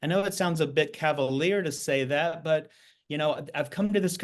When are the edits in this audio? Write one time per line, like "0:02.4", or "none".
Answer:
none